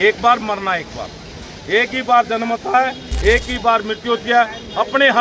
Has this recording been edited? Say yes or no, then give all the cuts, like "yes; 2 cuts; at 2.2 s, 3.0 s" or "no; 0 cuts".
no; 0 cuts